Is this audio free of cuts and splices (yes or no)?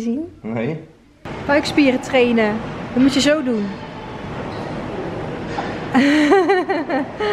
no